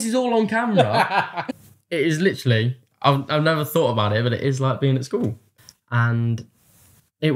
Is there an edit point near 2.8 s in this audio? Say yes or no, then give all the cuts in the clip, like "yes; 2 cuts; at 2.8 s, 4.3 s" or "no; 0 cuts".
no; 2 cuts; at 1.4 s, 5.4 s